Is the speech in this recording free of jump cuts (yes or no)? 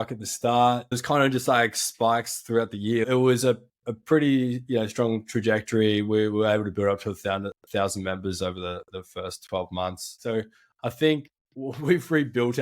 no